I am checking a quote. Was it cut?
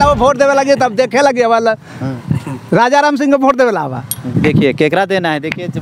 no; 0 cuts

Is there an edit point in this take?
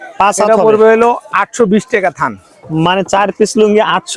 no; 0 cuts

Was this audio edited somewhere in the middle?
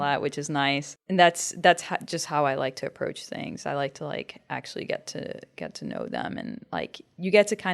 yes; 1 cut; at 0.9 s

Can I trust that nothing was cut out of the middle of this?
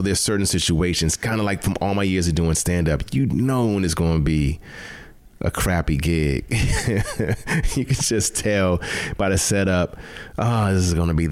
yes; 0 cuts

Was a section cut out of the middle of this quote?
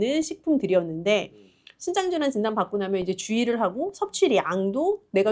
no; 0 cuts

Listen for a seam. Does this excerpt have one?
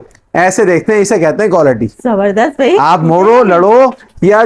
no; 0 cuts

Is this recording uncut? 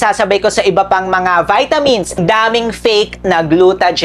no; 1 cut; at 2.2 s

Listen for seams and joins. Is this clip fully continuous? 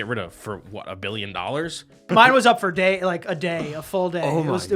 no; 1 cut; at 2.1 s

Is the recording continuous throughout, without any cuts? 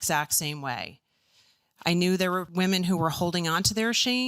no; 1 cut; at 2.5 s

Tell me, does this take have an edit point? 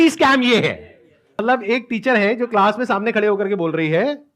yes; 1 cut; at 1.2 s

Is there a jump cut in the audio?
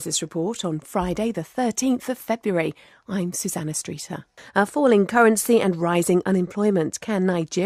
no; 0 cuts

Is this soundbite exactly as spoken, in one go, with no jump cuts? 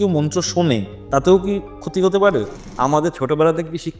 no; 1 cut; at 2.6 s

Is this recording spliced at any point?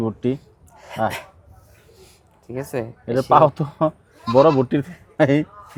no; 0 cuts

